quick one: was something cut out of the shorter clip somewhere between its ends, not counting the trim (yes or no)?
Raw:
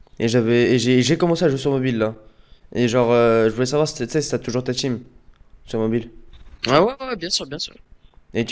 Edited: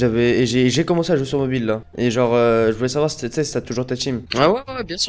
yes